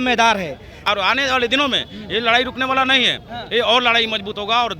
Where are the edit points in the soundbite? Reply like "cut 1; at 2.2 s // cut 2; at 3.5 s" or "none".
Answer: cut 1; at 1.0 s